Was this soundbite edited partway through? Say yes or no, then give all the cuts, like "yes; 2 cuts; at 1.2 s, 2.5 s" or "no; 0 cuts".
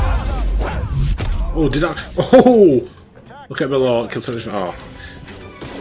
no; 0 cuts